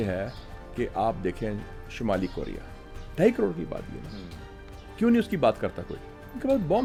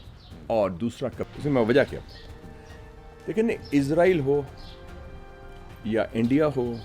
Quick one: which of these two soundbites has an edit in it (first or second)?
second